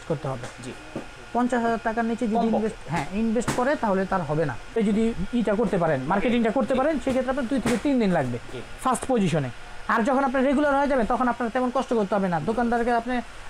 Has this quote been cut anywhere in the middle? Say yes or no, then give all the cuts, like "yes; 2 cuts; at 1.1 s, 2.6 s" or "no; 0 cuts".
yes; 1 cut; at 4.8 s